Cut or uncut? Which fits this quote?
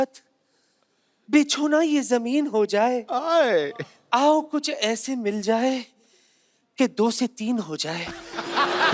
uncut